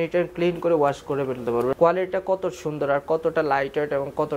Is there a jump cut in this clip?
yes; 1 cut; at 1.7 s

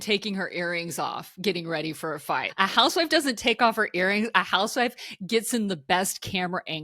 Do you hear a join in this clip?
yes; 1 cut; at 2.5 s

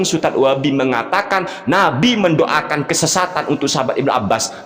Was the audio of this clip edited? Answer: no; 0 cuts

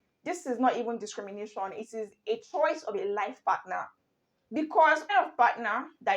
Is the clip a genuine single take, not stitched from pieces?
no; 1 cut; at 5.1 s

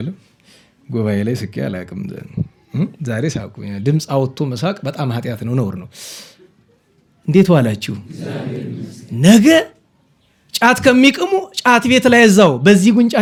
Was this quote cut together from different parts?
no; 0 cuts

